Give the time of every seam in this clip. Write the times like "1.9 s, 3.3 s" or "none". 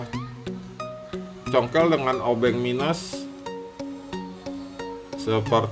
none